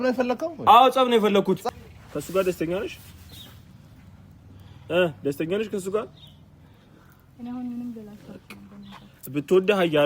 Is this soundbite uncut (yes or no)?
no